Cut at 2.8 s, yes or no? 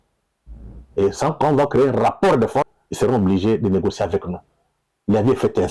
yes